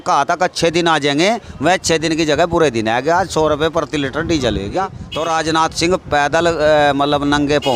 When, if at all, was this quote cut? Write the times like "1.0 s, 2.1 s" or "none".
5.0 s

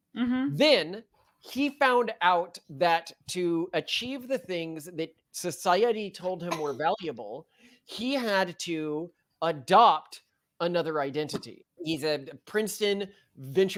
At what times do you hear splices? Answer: none

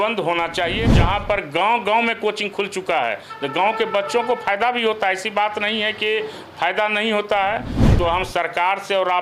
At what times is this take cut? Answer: 0.9 s, 7.8 s

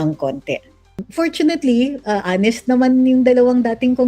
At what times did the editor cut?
1.0 s

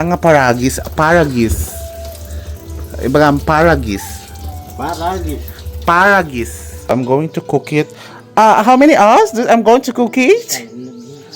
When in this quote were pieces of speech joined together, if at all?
6.9 s

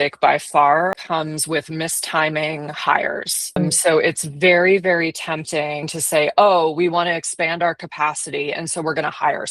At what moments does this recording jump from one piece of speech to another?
0.9 s, 5.9 s

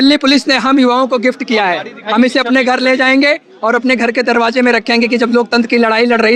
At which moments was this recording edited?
none

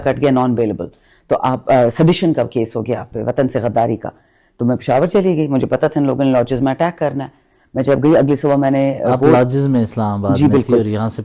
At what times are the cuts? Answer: none

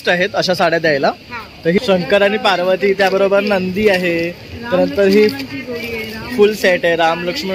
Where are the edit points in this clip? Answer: 1.8 s

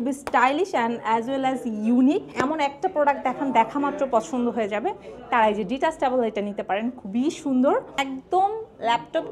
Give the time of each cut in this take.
2.3 s, 8.0 s

